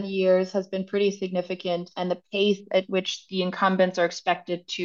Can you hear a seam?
no; 0 cuts

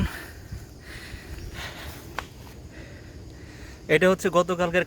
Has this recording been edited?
no; 0 cuts

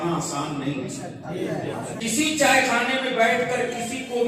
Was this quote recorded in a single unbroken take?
no; 1 cut; at 2.0 s

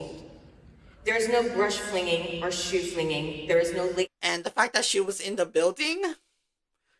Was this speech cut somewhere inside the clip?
yes; 1 cut; at 4.1 s

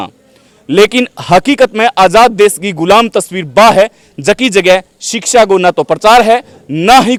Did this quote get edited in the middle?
no; 0 cuts

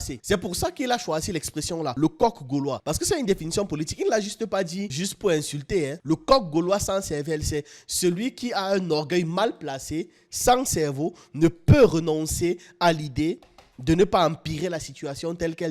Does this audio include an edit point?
no; 0 cuts

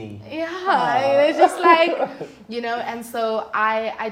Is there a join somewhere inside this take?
no; 0 cuts

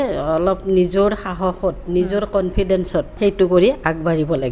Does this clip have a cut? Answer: yes; 1 cut; at 3.1 s

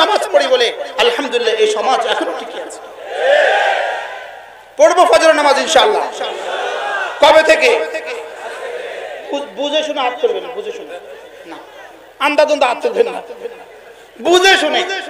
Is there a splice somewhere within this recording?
no; 0 cuts

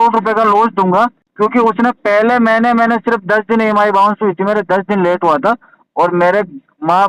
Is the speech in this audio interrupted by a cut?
yes; 1 cut; at 1.2 s

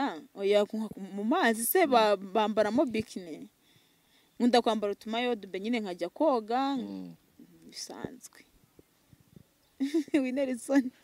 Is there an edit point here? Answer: no; 0 cuts

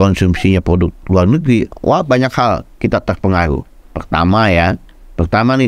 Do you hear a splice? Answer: no; 0 cuts

